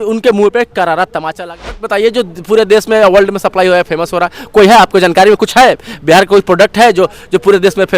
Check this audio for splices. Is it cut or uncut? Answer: cut